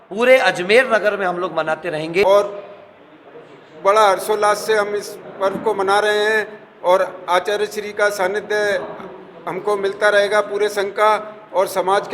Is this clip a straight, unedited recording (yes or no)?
no